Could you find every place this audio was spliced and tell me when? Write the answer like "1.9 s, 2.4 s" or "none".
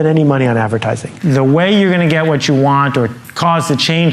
1.1 s